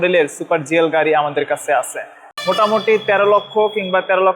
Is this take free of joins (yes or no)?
no